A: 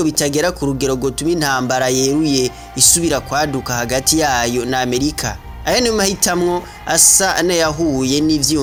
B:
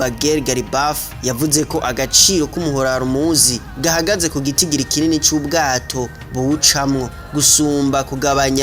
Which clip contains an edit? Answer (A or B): B